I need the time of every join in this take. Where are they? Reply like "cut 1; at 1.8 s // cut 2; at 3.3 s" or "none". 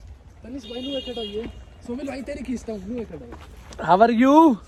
none

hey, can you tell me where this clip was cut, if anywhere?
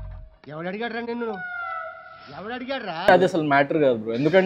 cut 1; at 3.1 s

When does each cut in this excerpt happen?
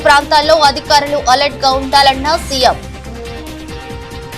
cut 1; at 2.8 s

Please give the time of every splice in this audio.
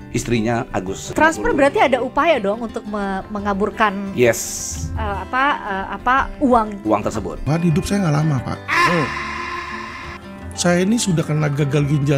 cut 1; at 1.0 s // cut 2; at 7.3 s

